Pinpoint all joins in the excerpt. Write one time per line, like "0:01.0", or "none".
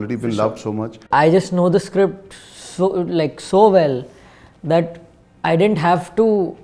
0:01.0